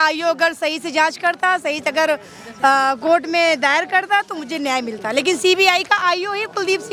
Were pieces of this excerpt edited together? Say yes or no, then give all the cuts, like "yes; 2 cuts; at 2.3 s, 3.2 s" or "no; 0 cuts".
no; 0 cuts